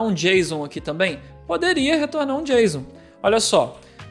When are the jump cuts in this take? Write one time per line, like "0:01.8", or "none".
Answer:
none